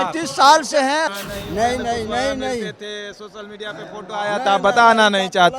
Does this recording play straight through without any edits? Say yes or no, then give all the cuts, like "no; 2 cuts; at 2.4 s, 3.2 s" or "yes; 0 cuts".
no; 1 cut; at 1.1 s